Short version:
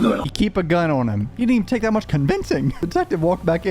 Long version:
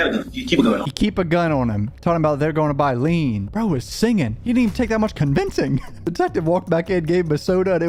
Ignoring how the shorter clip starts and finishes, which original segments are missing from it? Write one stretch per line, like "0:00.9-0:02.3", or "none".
0:01.9-0:04.4
0:05.8-0:06.0